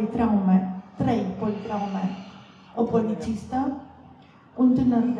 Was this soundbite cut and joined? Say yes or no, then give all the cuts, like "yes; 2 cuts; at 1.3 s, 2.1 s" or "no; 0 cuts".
no; 0 cuts